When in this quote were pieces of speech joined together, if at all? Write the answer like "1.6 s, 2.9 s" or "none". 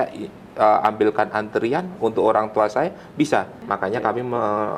3.6 s